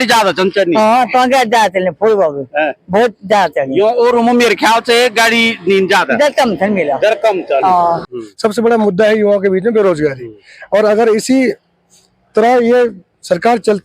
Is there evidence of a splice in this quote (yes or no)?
yes